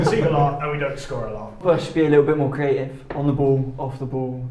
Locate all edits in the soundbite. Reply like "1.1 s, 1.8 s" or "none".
1.6 s